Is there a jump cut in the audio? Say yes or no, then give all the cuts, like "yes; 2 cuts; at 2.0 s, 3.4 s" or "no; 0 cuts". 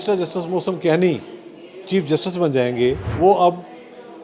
yes; 1 cut; at 3.1 s